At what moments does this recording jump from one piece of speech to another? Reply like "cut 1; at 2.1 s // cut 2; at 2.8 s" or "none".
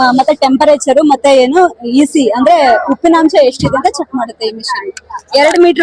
none

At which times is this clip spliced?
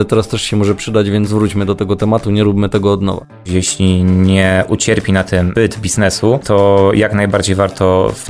cut 1; at 3.4 s // cut 2; at 6.4 s

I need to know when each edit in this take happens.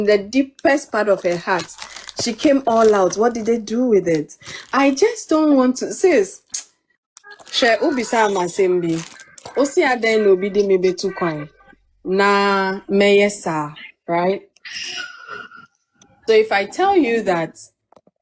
none

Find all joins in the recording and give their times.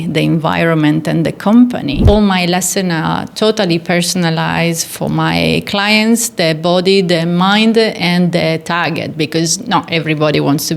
cut 1; at 2.0 s

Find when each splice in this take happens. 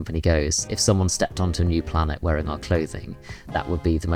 none

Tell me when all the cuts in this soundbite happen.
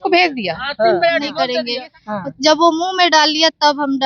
cut 1; at 1.6 s

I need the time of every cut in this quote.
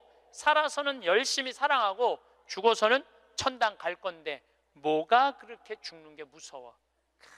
none

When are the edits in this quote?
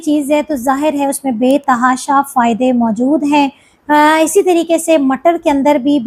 none

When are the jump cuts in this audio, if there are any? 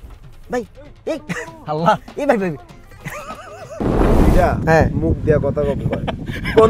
cut 1; at 4.0 s

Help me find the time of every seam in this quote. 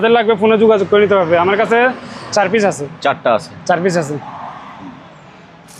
none

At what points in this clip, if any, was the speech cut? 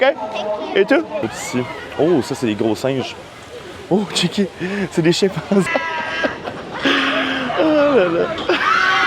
cut 1; at 1.3 s // cut 2; at 5.7 s

